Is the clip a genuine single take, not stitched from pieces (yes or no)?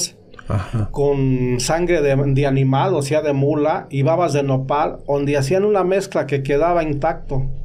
yes